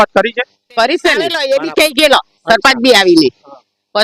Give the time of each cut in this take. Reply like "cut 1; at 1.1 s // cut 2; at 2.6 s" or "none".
cut 1; at 1.4 s